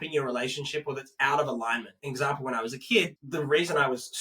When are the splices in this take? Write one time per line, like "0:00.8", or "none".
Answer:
0:01.9
0:03.2